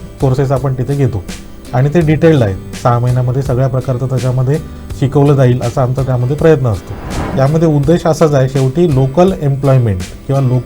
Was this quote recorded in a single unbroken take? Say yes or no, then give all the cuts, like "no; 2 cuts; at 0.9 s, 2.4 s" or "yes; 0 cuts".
no; 1 cut; at 7.3 s